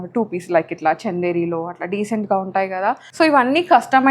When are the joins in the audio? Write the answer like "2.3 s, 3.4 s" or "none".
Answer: 3.1 s